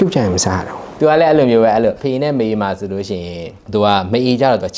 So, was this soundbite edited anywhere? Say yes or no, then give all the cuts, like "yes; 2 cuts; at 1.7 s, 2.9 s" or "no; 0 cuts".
no; 0 cuts